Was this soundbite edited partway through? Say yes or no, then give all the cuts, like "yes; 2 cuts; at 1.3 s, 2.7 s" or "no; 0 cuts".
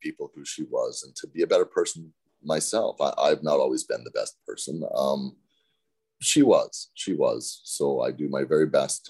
no; 0 cuts